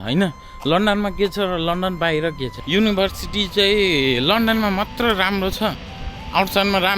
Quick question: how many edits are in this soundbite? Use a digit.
1